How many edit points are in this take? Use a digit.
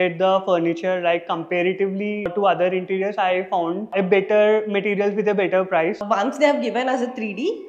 2